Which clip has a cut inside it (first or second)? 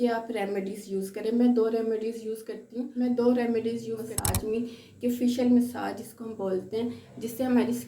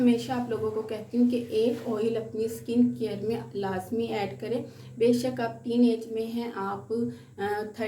first